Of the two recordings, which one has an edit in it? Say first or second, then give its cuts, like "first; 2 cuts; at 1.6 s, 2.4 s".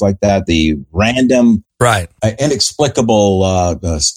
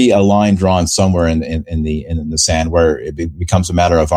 first; 1 cut; at 2.1 s